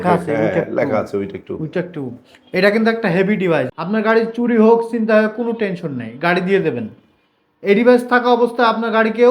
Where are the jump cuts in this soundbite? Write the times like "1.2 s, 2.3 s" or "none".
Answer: 3.7 s

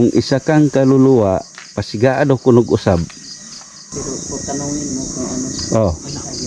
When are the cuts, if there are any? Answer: 3.9 s

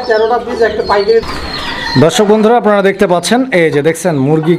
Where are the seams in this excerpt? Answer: 1.2 s

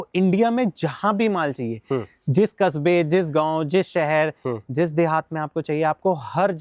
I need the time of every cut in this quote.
none

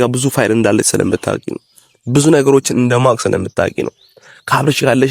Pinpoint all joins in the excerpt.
none

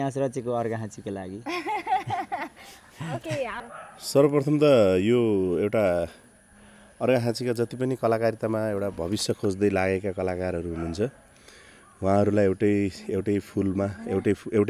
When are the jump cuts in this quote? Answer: 3.6 s

